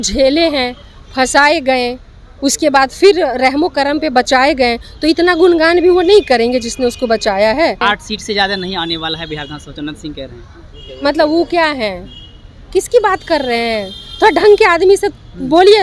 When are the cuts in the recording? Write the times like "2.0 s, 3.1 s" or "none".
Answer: 7.8 s